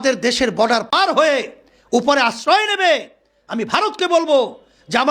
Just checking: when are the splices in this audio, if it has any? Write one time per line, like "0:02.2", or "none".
0:00.9